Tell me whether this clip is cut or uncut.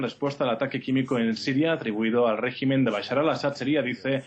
cut